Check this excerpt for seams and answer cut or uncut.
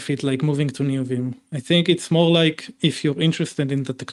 uncut